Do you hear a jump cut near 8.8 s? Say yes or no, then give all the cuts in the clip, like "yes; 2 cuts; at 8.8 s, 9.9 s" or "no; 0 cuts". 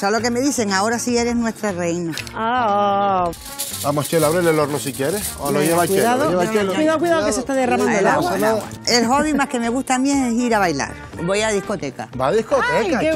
yes; 3 cuts; at 3.4 s, 8.8 s, 11.1 s